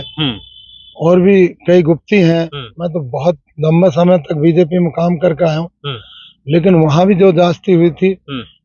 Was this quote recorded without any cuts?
no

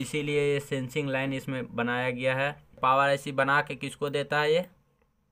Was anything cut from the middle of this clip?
yes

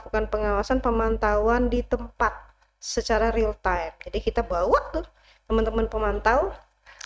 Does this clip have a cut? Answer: no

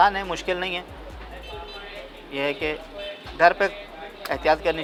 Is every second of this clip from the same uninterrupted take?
yes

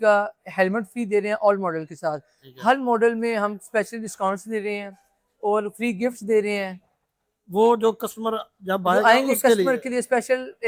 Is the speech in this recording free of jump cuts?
yes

